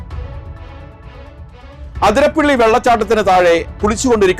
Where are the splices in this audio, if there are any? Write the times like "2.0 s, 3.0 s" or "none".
none